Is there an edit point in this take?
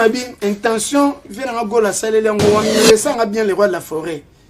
yes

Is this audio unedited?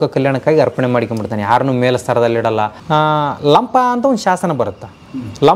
no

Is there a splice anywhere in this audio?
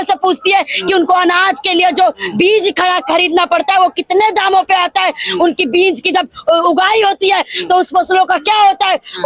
no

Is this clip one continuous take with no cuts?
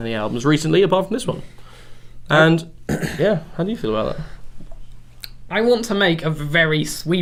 yes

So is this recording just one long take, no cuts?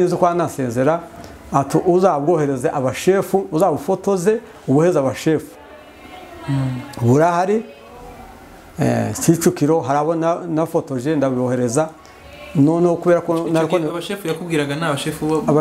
yes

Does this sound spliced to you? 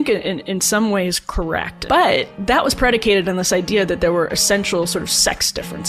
yes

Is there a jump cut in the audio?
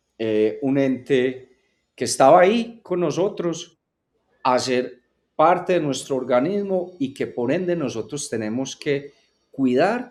no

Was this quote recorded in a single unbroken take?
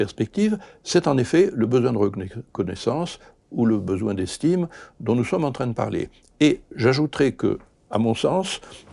yes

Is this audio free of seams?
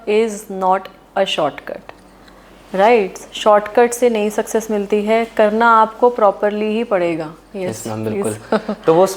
yes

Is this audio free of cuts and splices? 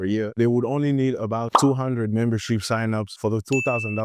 no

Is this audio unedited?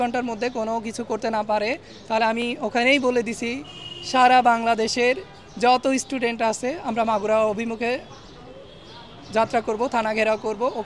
yes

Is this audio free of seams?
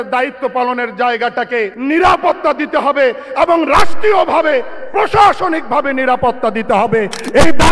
no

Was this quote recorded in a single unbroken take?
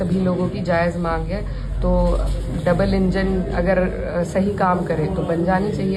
yes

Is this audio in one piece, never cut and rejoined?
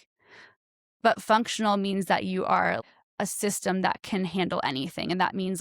no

